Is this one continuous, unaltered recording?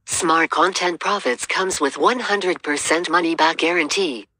no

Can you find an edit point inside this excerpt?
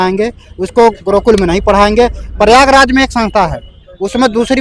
no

